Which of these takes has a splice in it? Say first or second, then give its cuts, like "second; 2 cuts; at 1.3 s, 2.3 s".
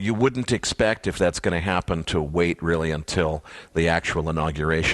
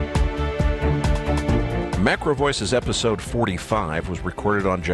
first; 1 cut; at 2.3 s